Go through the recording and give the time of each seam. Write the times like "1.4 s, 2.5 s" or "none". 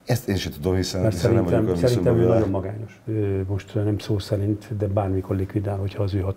2.9 s